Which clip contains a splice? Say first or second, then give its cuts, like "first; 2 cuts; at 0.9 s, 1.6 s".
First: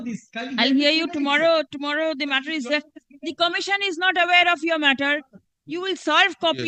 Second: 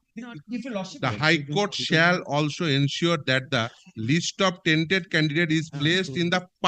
second; 1 cut; at 0.9 s